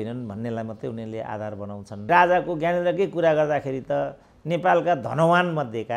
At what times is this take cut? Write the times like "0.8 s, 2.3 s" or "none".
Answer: 2.1 s